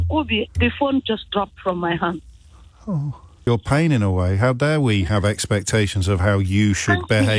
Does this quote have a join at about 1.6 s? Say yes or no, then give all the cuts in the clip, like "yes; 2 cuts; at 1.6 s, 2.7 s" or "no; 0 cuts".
no; 1 cut; at 3.3 s